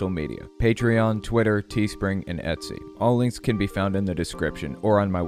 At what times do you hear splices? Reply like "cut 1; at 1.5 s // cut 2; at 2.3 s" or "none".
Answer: none